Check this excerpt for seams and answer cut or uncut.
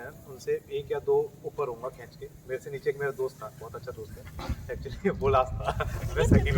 uncut